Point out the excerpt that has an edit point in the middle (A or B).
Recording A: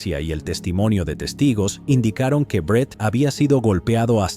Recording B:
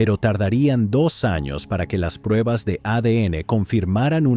A